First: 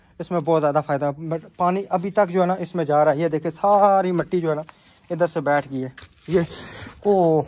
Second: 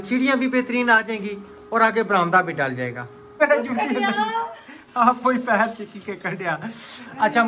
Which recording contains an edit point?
second; 1 cut; at 3.3 s

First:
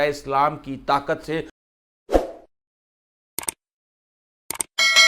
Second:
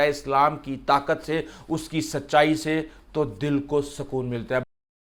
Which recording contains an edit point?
first; 1 cut; at 1.6 s

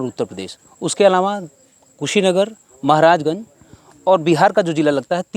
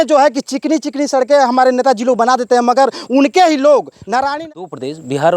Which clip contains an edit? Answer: second; 1 cut; at 4.4 s

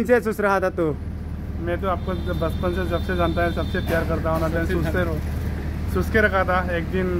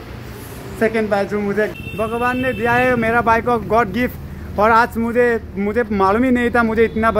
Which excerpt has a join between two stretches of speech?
second; 1 cut; at 1.7 s

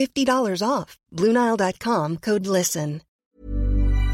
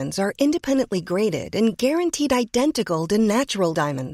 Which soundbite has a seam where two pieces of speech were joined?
first; 1 cut; at 3.2 s

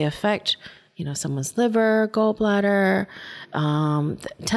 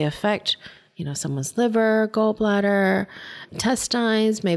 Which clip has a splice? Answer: second; 1 cut; at 3.4 s

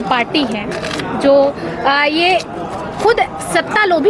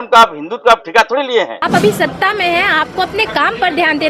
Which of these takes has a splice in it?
second; 1 cut; at 1.6 s

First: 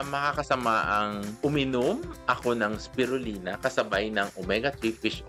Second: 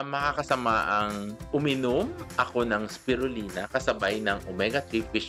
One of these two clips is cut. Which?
first; 1 cut; at 1.3 s

